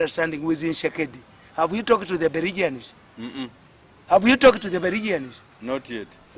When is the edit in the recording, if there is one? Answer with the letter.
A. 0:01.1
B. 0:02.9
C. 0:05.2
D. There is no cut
D